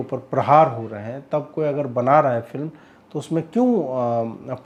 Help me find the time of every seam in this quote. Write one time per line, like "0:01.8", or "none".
none